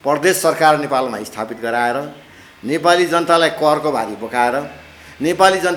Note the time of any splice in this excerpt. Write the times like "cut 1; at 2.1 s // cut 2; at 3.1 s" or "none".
none